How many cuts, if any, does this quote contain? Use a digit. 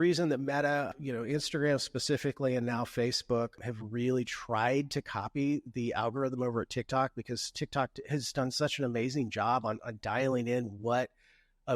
2